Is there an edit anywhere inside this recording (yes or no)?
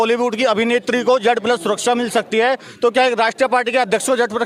no